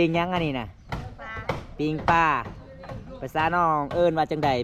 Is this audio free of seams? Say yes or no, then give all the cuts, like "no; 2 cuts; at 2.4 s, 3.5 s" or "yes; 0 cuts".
yes; 0 cuts